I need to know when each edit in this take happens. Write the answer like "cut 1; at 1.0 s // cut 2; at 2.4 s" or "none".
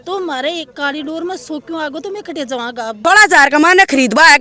cut 1; at 3.0 s